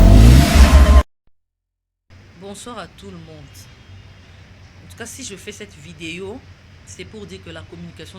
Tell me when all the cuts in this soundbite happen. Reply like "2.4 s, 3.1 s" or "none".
1.1 s